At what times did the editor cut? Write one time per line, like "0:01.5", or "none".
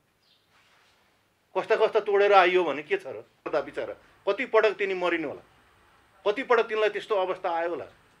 0:03.5